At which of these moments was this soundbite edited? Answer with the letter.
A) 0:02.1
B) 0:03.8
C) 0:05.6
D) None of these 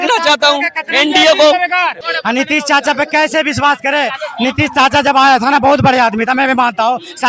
A